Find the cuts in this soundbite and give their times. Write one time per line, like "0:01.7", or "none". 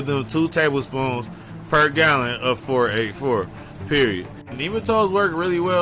0:04.5